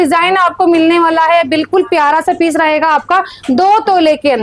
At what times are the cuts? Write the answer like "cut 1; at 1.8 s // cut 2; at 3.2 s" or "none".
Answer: none